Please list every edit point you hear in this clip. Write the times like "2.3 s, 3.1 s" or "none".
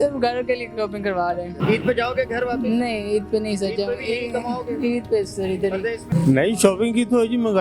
1.5 s, 6.0 s